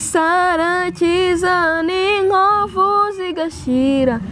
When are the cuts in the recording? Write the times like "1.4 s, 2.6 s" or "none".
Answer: none